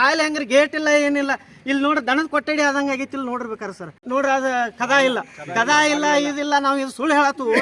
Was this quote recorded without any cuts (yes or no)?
no